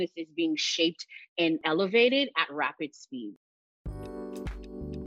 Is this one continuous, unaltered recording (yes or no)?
no